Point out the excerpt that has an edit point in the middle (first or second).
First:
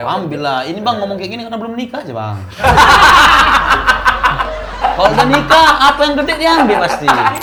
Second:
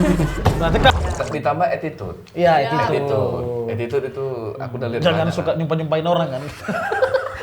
second